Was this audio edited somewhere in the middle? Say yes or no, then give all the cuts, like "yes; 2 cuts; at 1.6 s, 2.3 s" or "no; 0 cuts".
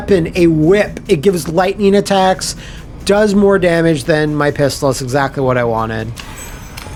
no; 0 cuts